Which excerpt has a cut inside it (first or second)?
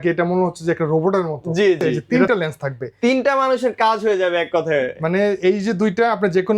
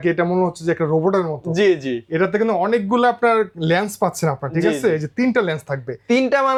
first